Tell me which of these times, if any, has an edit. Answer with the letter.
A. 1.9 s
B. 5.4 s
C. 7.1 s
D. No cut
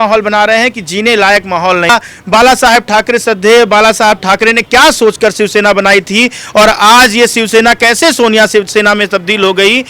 A